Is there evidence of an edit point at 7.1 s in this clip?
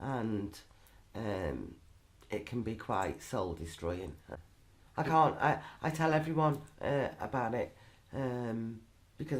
no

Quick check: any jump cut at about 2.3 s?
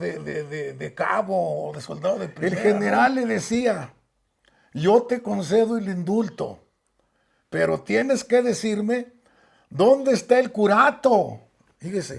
yes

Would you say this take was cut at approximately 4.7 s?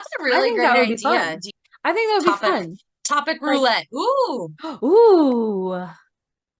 no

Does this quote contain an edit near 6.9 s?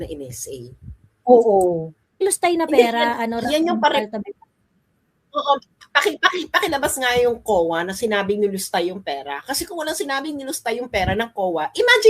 no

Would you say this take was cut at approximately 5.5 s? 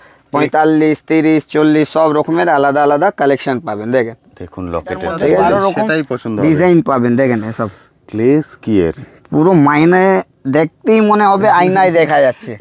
yes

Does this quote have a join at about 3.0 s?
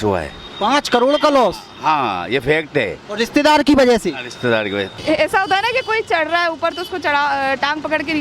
no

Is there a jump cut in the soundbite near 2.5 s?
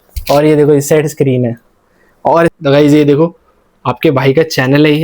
yes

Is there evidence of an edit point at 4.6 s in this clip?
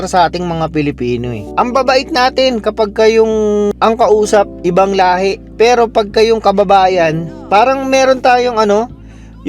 yes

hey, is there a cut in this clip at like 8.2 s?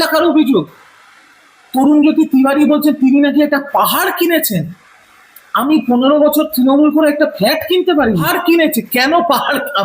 yes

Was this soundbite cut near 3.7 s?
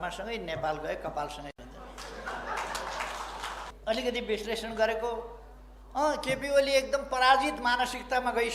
yes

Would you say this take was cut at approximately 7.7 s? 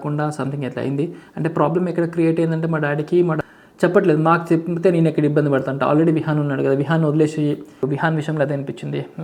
yes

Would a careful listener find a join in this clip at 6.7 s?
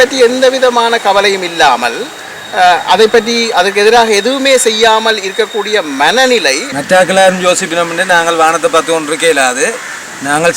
yes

